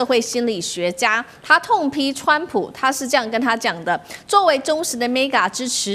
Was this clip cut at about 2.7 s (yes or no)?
no